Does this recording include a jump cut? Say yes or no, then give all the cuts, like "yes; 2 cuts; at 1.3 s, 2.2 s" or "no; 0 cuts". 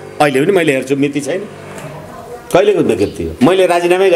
yes; 1 cut; at 3.2 s